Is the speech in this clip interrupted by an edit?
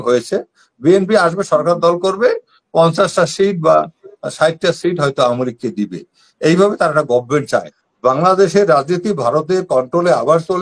yes; 1 cut; at 7.8 s

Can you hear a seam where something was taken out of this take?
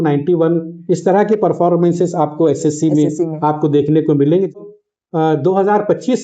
yes; 1 cut; at 4.5 s

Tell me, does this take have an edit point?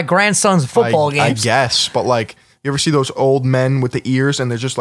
yes; 1 cut; at 3.1 s

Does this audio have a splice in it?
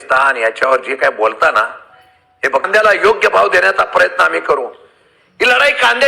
yes; 1 cut; at 2.6 s

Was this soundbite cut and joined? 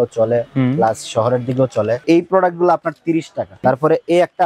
yes; 2 cuts; at 2.0 s, 3.5 s

